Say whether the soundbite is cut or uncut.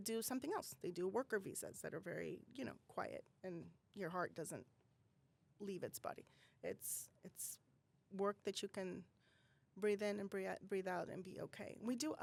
uncut